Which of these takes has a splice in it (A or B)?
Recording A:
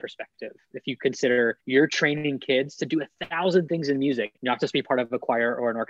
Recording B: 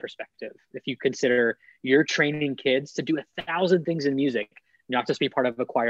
A